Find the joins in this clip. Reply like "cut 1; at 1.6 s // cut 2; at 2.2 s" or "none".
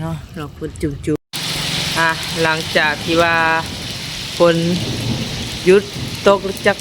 cut 1; at 1.2 s